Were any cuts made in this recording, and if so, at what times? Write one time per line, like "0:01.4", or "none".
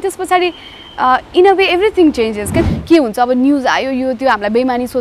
0:02.6